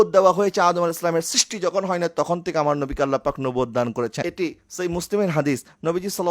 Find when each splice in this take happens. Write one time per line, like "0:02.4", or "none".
0:04.2